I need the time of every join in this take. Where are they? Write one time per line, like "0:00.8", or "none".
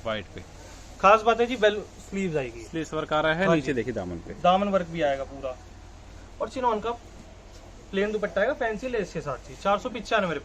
none